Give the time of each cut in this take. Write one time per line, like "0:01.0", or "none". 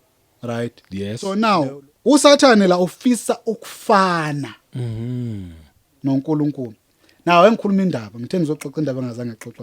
0:01.3